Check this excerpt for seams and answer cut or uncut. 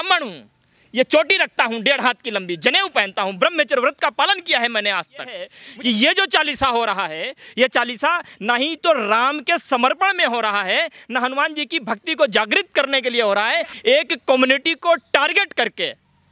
cut